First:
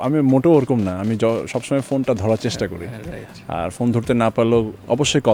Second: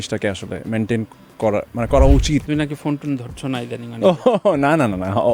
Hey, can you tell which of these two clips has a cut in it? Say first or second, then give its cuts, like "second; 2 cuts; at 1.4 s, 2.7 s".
second; 1 cut; at 2.5 s